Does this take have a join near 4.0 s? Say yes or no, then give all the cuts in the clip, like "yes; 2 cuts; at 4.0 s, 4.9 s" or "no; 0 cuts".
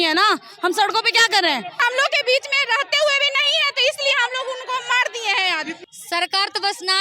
no; 2 cuts; at 1.8 s, 5.8 s